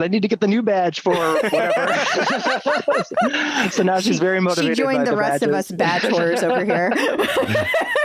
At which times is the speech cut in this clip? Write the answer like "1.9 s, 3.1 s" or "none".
none